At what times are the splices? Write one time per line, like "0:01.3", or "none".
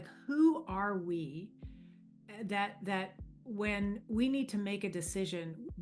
none